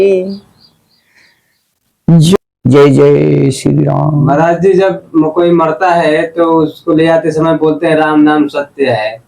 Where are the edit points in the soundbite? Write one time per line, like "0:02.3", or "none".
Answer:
0:02.4